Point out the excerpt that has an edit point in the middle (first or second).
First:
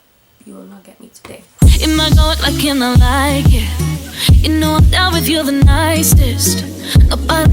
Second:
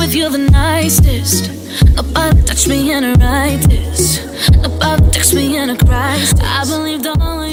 first